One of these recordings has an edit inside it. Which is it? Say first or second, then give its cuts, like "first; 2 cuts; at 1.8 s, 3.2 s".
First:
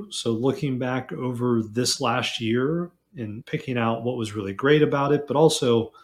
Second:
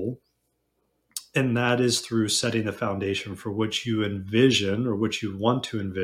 first; 1 cut; at 3.4 s